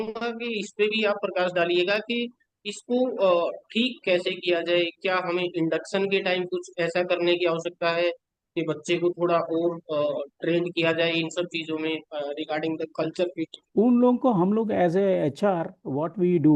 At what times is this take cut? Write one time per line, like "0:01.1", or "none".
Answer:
0:13.6